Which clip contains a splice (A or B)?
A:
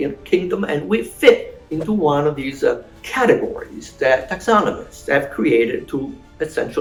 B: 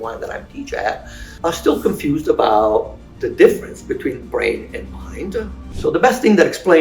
B